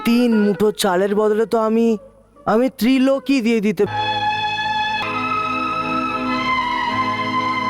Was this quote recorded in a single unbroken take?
no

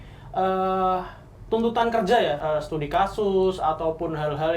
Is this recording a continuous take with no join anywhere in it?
no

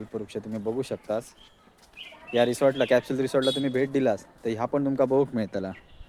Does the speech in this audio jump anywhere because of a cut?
no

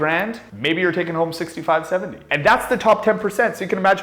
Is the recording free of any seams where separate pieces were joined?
yes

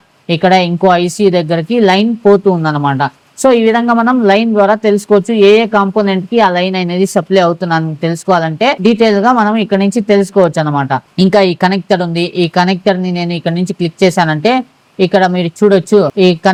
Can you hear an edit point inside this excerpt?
no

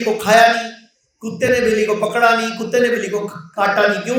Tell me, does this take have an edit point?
no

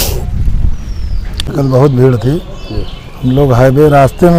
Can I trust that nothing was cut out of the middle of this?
no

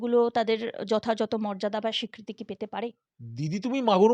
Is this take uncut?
no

